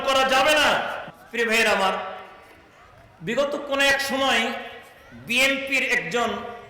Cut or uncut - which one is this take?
cut